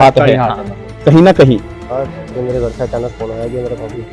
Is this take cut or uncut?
cut